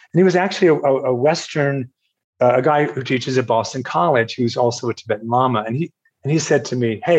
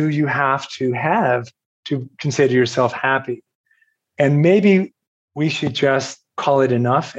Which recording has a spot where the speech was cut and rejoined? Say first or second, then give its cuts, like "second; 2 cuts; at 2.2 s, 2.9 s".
second; 1 cut; at 6.2 s